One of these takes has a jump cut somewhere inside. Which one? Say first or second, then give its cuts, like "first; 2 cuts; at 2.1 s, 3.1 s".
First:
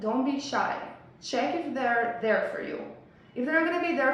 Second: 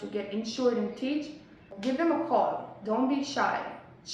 second; 1 cut; at 1.7 s